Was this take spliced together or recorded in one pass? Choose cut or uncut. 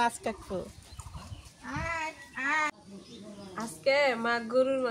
cut